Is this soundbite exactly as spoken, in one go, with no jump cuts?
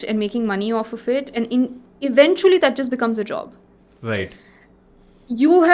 yes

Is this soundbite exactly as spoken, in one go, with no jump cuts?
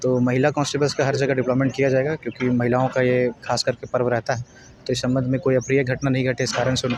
yes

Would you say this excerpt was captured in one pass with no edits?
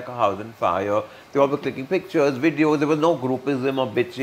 yes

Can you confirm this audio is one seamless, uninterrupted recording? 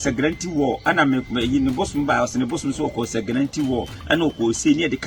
yes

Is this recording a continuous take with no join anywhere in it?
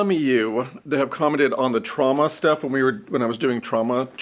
yes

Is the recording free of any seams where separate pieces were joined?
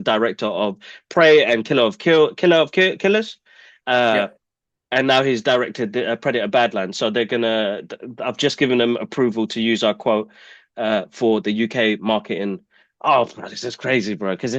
yes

